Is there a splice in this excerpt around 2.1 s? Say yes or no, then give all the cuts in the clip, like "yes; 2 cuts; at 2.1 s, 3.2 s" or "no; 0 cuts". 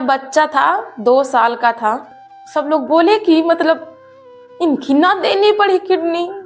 yes; 1 cut; at 2.1 s